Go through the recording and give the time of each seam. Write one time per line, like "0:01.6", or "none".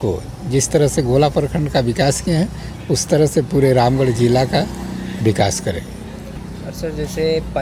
none